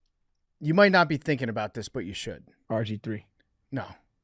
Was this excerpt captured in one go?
no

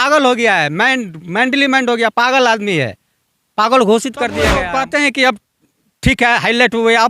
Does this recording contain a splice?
yes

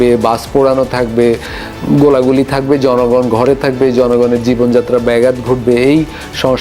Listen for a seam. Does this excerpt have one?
no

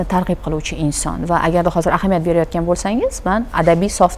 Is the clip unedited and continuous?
yes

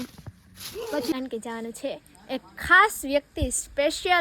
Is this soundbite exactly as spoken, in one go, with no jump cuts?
no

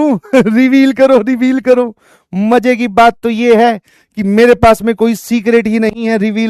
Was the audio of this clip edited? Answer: no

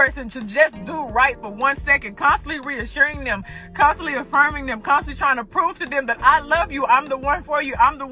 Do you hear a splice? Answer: yes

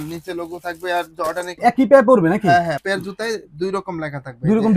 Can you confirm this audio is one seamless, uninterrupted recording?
no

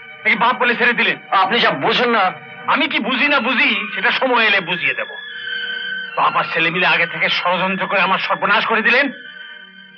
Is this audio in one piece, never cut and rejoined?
yes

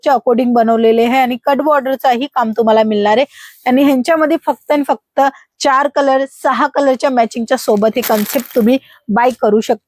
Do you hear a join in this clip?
no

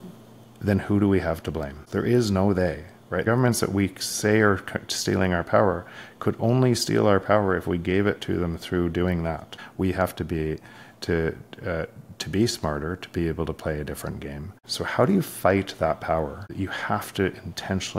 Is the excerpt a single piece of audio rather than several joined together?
no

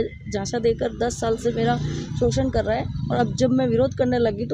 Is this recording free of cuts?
yes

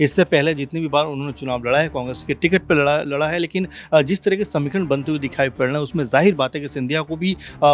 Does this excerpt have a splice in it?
no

